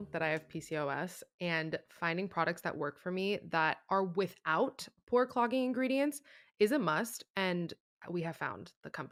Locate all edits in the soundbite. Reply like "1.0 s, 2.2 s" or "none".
none